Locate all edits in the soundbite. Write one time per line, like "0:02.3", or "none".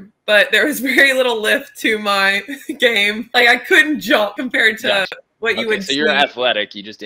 0:03.3
0:04.4